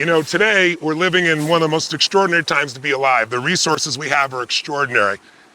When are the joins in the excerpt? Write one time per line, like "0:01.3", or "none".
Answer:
0:01.0